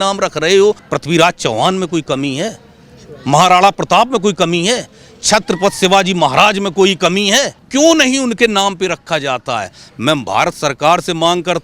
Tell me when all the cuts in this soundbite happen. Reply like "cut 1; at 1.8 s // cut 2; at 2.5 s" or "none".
cut 1; at 0.9 s // cut 2; at 7.6 s